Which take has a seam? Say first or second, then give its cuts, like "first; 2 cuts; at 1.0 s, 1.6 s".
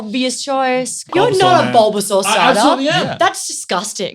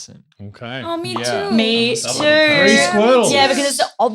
first; 1 cut; at 1.1 s